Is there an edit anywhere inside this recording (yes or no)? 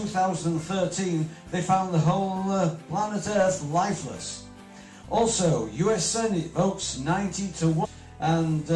no